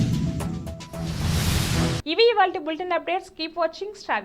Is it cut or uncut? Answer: uncut